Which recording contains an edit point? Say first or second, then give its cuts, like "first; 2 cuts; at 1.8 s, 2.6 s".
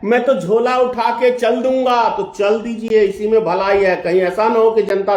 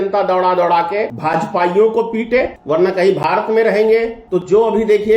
second; 3 cuts; at 1.1 s, 2.6 s, 4.2 s